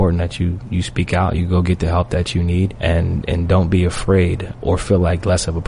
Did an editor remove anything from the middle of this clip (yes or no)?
yes